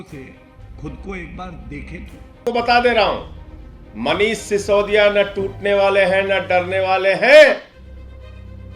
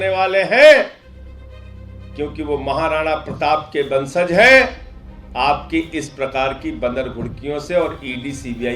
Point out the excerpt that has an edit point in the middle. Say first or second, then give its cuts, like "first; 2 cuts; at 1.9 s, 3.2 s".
first; 1 cut; at 2.4 s